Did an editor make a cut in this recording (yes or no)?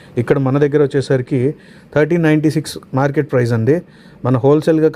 no